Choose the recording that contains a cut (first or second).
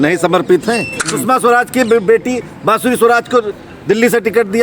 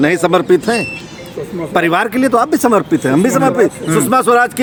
first